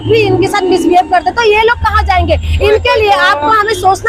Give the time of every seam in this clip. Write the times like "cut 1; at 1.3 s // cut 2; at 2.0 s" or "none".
none